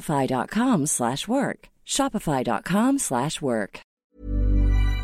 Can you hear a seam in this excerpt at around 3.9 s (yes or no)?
yes